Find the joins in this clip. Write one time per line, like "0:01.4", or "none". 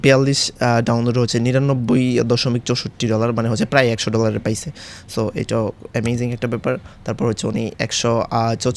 none